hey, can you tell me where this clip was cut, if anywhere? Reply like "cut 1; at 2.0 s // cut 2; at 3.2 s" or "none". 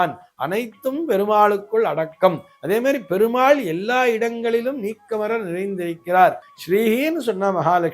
cut 1; at 6.5 s